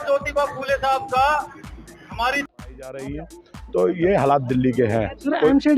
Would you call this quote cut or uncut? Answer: cut